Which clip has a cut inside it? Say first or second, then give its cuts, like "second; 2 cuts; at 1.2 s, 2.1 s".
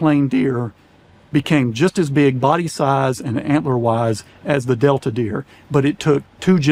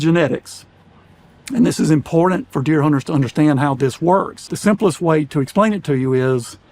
second; 1 cut; at 4.5 s